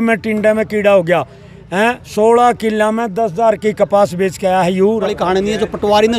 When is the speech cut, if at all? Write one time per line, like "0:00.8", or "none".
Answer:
0:05.0